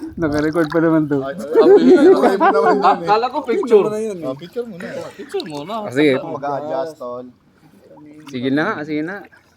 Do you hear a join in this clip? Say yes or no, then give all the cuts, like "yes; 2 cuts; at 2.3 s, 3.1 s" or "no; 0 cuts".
yes; 1 cut; at 6.2 s